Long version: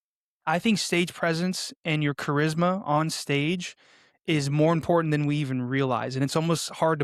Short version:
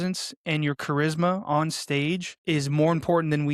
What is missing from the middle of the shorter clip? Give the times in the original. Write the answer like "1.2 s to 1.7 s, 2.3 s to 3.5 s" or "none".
3.7 s to 4.1 s